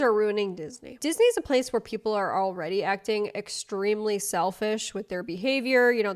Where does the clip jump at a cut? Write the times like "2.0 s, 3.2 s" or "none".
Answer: 1.0 s

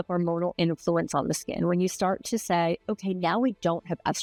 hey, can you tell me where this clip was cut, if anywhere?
none

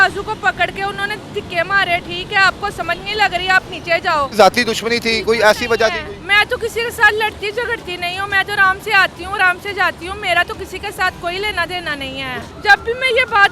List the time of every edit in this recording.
4.3 s, 12.5 s

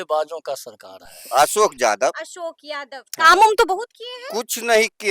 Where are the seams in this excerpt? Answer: 1.2 s

